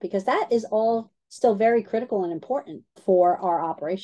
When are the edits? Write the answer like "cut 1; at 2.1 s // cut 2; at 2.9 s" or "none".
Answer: none